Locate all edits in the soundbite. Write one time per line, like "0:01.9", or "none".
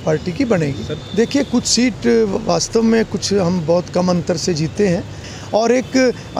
0:00.9
0:05.3

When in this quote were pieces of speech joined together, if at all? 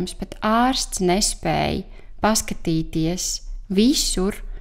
none

